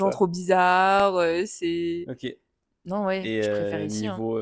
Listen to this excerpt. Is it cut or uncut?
uncut